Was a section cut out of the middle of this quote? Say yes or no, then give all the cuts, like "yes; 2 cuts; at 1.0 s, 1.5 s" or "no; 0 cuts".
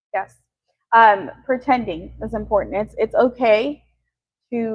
no; 0 cuts